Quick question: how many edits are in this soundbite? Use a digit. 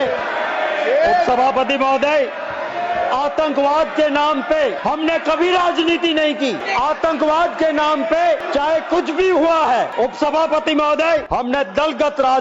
5